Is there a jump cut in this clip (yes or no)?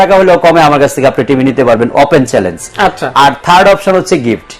no